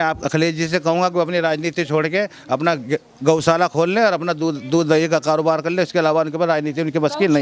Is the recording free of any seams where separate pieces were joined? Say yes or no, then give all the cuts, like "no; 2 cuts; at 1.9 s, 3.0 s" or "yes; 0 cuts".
yes; 0 cuts